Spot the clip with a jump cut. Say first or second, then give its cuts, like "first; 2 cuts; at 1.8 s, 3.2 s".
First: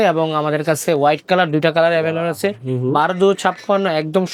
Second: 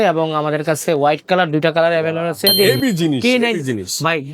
second; 1 cut; at 2.5 s